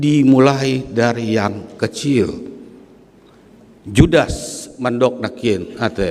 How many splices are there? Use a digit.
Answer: 0